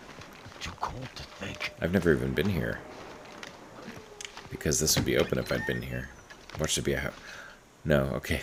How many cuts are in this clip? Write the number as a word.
zero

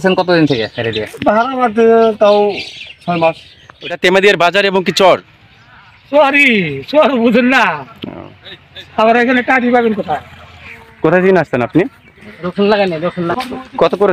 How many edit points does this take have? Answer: three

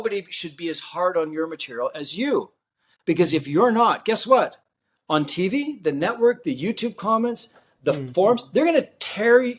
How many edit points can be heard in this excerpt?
zero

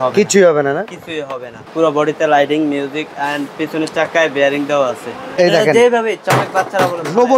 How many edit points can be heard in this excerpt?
two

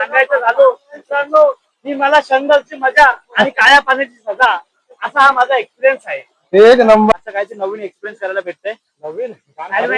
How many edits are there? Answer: one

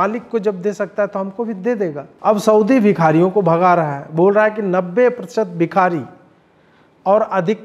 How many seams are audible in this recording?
one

